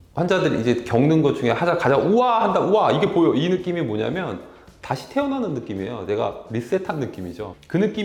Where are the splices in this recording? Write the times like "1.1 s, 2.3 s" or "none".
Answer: none